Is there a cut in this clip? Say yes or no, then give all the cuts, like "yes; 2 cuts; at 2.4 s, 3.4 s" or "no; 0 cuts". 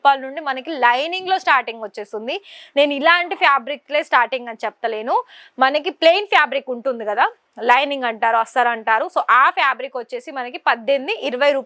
no; 0 cuts